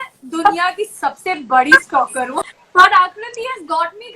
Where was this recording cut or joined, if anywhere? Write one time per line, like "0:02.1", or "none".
0:02.5